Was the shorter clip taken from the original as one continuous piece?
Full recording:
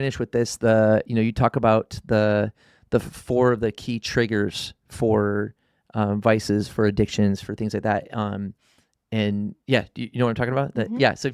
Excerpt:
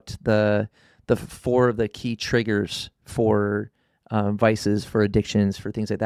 yes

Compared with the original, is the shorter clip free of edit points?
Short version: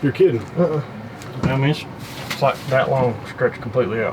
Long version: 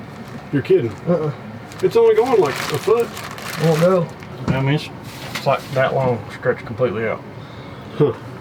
no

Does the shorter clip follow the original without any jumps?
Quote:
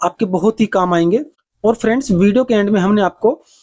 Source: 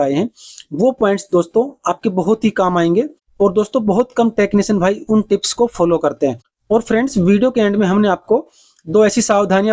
no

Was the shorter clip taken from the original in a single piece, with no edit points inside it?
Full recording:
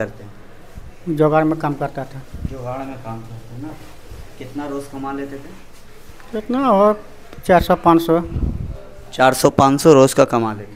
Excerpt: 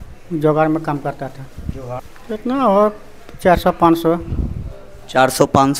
no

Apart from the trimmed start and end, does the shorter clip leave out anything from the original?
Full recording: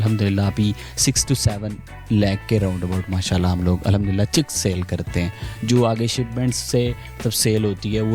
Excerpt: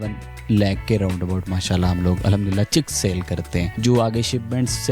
yes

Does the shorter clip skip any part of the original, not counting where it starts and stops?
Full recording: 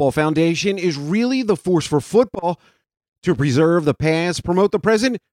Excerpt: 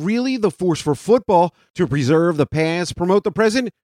yes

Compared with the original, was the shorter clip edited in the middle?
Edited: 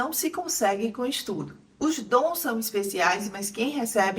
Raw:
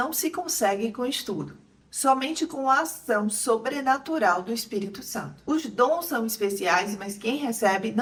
yes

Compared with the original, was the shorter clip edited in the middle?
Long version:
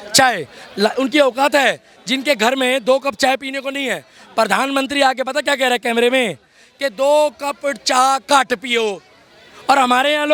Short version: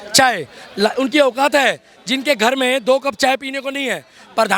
no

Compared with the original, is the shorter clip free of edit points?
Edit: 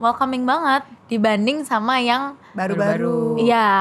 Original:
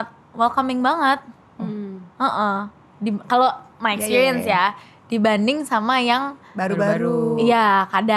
no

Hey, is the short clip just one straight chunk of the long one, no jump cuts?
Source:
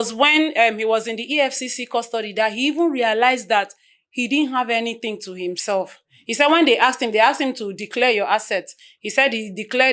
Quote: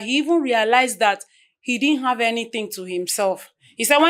yes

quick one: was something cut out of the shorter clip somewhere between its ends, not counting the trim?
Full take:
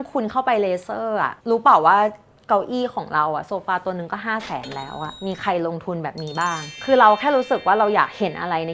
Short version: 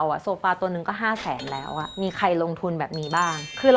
no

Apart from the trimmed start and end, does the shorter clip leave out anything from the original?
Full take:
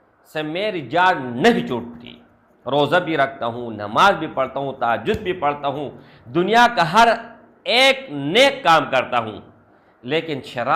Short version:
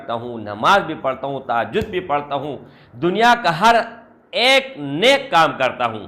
no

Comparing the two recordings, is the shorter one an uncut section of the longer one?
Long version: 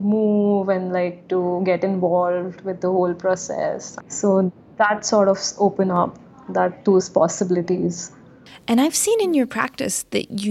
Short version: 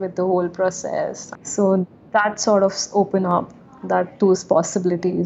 yes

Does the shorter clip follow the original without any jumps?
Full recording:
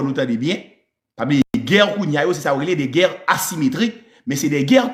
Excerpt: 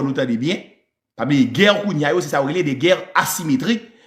no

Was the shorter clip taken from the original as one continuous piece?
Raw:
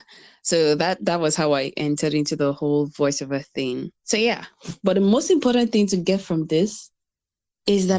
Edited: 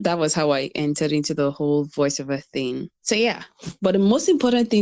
yes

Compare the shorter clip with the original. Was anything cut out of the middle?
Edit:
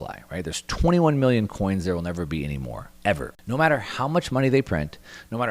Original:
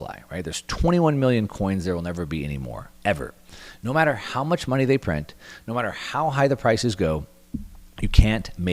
yes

